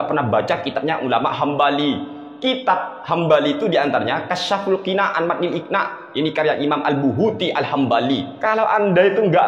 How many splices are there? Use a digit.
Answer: 1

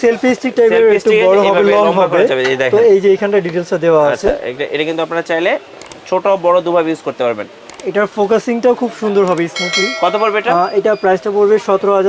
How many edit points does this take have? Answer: 0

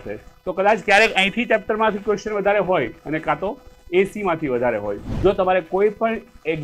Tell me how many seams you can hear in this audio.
1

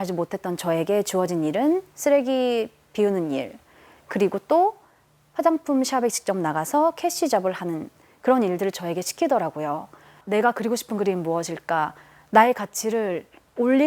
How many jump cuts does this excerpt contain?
1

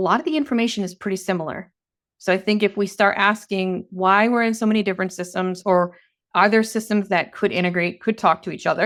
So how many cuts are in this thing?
0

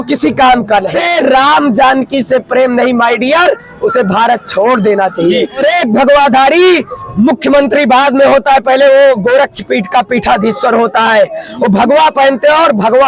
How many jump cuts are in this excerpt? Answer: 2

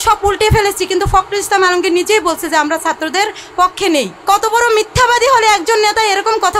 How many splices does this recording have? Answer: 1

